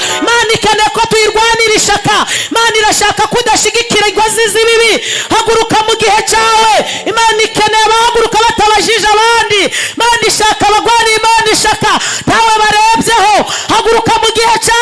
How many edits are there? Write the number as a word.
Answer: zero